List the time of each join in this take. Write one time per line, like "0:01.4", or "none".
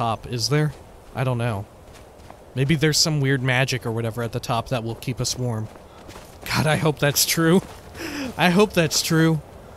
none